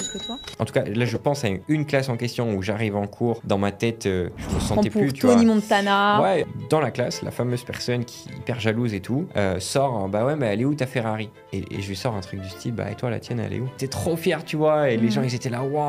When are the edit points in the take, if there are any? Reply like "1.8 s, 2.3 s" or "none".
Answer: 6.4 s, 9.3 s, 13.8 s